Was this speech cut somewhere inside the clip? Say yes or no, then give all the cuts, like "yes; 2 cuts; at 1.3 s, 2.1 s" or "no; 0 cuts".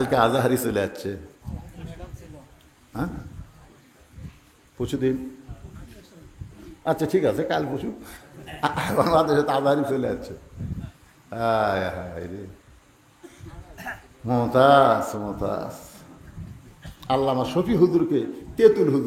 no; 0 cuts